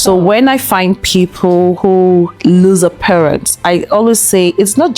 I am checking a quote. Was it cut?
yes; 1 cut; at 1.8 s

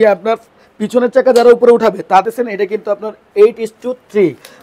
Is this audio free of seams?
no; 1 cut; at 2.2 s

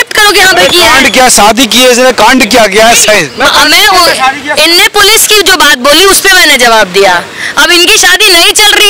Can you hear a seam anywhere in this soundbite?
no; 0 cuts

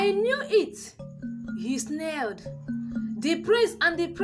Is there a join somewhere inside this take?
no; 0 cuts

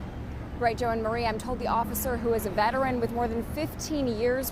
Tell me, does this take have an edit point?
no; 0 cuts

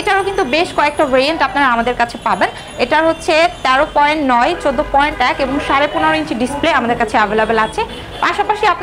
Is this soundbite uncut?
yes; 0 cuts

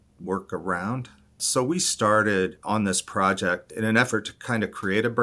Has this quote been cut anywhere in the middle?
yes; 3 cuts; at 1.4 s, 2.6 s, 3.7 s

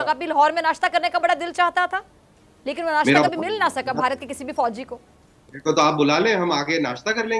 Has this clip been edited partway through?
no; 0 cuts

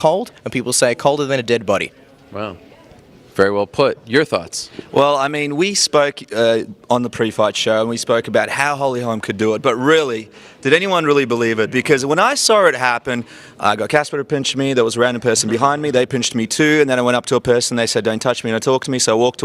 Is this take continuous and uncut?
no; 1 cut; at 4.4 s

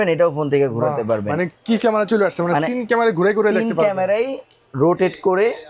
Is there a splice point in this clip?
no; 0 cuts

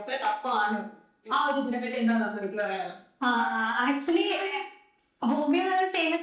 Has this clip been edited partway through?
no; 0 cuts

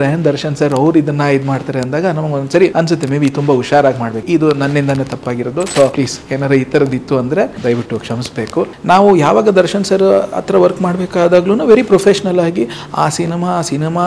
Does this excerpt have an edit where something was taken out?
yes; 5 cuts; at 2.7 s, 4.2 s, 5.9 s, 7.6 s, 8.7 s

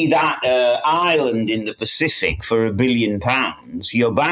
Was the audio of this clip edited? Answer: no; 0 cuts

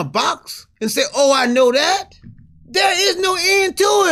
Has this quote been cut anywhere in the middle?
no; 0 cuts

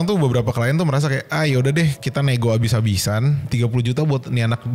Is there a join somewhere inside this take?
yes; 2 cuts; at 2.0 s, 3.4 s

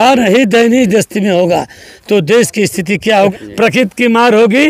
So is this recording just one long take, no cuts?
no; 1 cut; at 3.3 s

